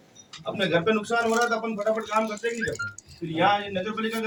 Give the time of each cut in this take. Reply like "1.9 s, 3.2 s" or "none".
none